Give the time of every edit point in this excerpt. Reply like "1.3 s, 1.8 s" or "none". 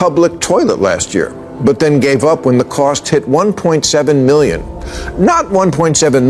none